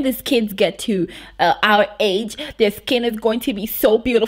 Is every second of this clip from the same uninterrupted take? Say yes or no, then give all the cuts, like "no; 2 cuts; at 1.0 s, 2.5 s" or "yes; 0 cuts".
yes; 0 cuts